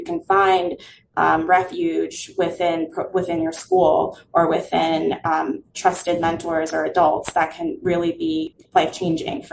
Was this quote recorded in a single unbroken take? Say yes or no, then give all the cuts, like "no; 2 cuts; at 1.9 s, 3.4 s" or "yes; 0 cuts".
no; 1 cut; at 8.5 s